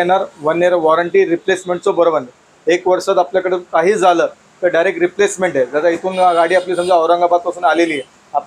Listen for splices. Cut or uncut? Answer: uncut